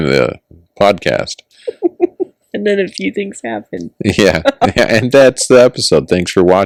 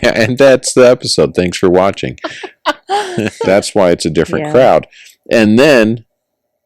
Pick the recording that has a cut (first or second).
second